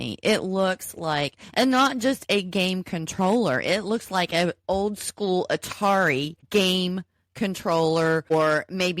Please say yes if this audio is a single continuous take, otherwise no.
no